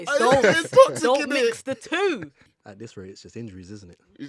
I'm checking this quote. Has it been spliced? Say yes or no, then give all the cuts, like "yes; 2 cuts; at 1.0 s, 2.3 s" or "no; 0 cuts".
yes; 1 cut; at 2.4 s